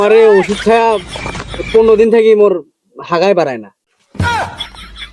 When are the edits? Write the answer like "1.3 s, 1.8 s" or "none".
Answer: none